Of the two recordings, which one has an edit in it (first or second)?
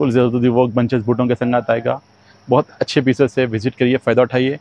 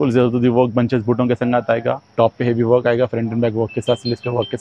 second